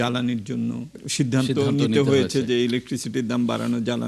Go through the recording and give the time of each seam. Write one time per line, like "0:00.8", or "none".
0:01.0